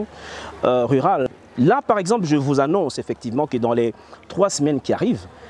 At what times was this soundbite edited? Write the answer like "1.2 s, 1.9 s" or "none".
1.3 s